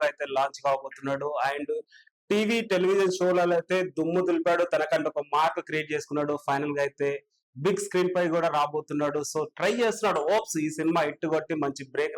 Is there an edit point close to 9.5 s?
no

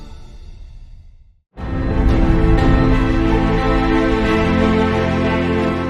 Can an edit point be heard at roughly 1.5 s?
no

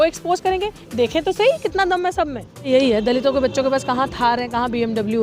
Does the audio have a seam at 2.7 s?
yes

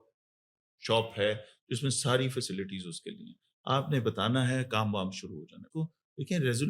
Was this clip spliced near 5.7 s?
yes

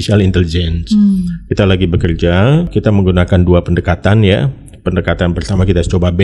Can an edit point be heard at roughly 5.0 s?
no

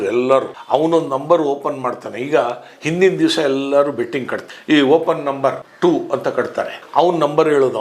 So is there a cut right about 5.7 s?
yes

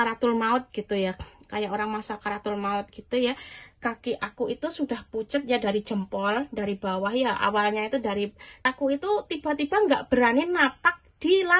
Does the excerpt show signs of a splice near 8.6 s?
yes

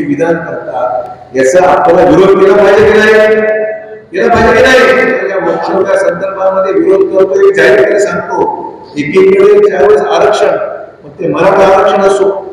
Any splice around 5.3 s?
yes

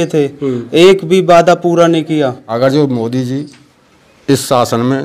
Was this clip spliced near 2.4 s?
yes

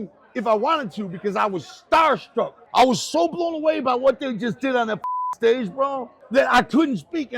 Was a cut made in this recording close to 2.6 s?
yes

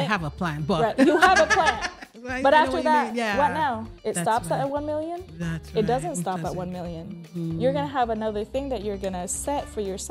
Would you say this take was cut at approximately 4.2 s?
no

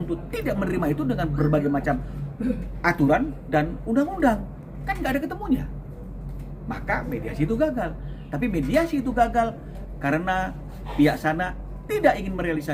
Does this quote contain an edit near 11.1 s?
no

